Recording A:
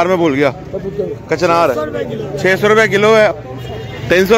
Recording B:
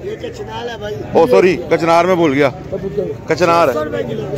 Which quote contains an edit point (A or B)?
A